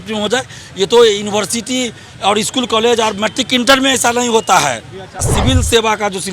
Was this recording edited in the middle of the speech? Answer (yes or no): yes